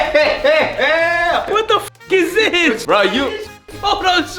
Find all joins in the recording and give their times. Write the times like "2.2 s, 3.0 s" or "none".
1.4 s, 2.8 s

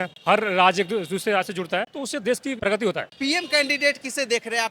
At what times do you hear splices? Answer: 2.7 s

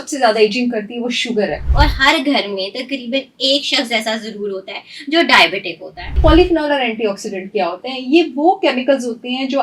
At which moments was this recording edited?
1.6 s, 6.2 s

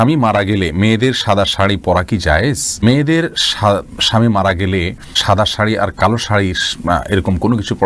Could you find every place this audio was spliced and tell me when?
none

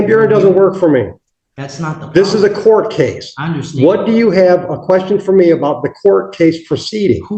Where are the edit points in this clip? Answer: none

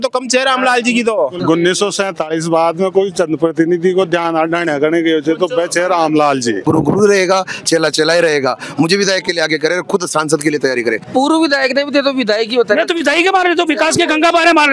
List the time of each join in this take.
1.4 s, 6.6 s, 11.1 s

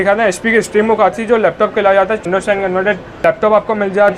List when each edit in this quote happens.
2.2 s, 3.2 s

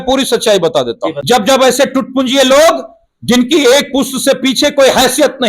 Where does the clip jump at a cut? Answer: 1.1 s

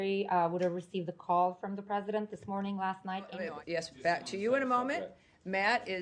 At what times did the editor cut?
3.4 s

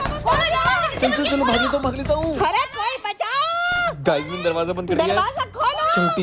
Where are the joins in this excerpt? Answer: none

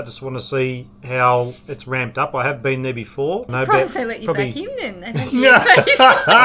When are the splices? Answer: 3.5 s

